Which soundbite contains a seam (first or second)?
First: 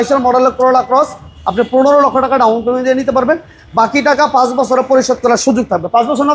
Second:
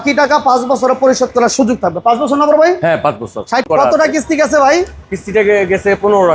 second